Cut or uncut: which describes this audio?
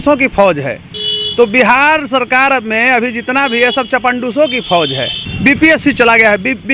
cut